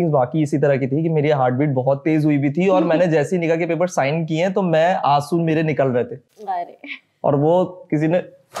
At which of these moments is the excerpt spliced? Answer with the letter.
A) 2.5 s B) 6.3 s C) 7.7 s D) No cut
D